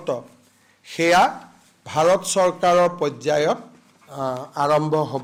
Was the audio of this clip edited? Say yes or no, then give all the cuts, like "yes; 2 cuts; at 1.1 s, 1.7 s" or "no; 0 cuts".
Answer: no; 0 cuts